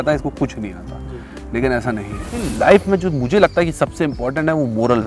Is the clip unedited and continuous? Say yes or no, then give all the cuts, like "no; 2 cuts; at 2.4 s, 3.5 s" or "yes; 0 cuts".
no; 1 cut; at 2.4 s